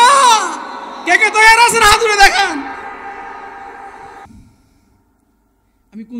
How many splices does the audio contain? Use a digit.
1